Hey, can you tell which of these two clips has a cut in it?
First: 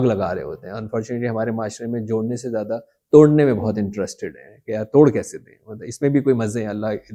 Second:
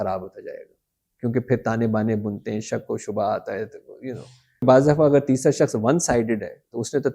second; 1 cut; at 4.6 s

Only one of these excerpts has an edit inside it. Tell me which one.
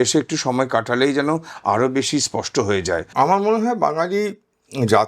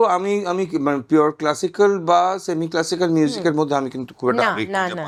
first; 1 cut; at 3.1 s

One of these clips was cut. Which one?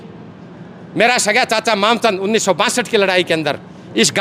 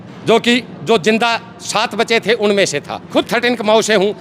second; 1 cut; at 3.1 s

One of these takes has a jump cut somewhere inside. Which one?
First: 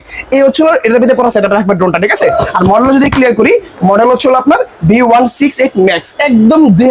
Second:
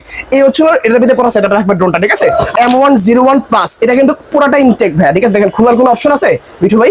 second; 1 cut; at 2.5 s

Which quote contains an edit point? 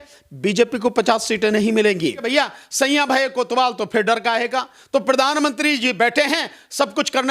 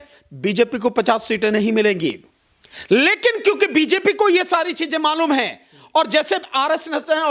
first; 1 cut; at 2.2 s

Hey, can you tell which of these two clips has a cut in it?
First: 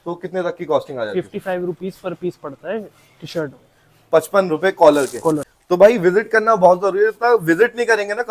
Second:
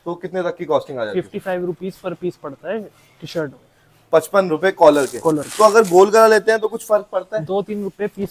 first; 1 cut; at 5.5 s

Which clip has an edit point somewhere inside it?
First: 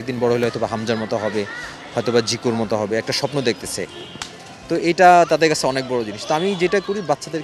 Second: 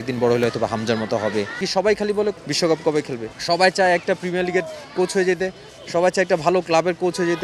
second; 3 cuts; at 1.7 s, 2.4 s, 3.3 s

